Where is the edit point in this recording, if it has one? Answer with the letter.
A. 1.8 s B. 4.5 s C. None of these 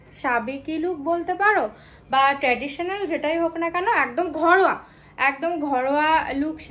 C